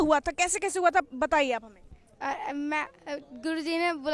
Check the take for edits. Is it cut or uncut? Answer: uncut